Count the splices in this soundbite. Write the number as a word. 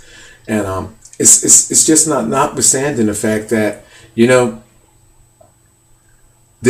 zero